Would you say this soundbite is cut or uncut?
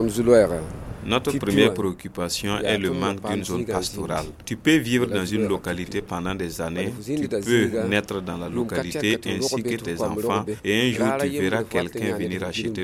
uncut